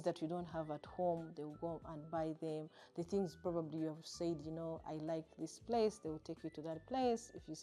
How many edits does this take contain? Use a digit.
0